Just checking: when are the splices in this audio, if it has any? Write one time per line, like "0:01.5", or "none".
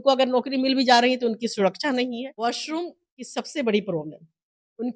0:02.2